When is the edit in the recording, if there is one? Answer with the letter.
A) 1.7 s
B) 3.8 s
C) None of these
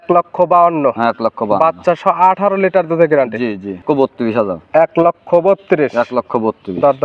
B